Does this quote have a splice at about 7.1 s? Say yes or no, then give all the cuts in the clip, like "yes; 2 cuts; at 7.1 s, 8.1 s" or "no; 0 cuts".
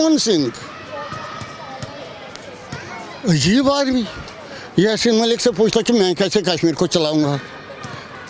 no; 0 cuts